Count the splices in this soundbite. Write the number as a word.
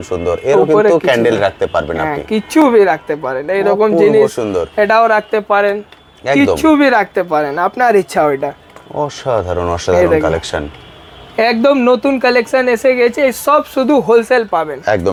zero